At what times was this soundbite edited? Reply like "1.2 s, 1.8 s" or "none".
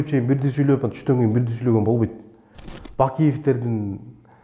2.7 s